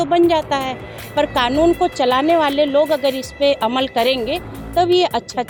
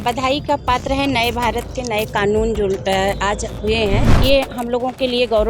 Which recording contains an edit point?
second; 1 cut; at 4.1 s

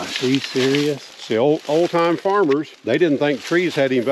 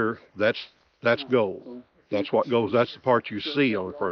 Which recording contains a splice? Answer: first; 2 cuts; at 1.1 s, 2.7 s

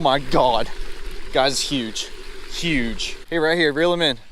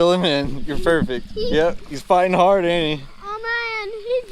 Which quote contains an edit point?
first; 1 cut; at 3.1 s

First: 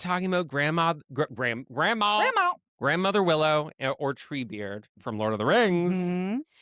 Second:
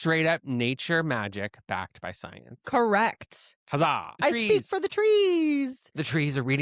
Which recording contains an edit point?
second; 1 cut; at 4.1 s

